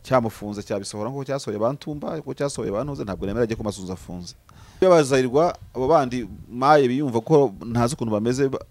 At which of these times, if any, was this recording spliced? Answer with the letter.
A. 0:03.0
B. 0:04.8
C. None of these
B